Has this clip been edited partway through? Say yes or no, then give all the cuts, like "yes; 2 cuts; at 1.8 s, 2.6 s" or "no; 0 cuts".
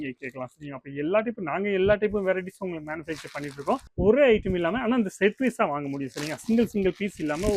yes; 1 cut; at 3.9 s